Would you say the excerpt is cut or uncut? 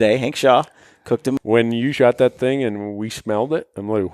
cut